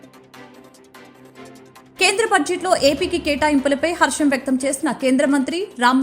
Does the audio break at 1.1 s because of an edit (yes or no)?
yes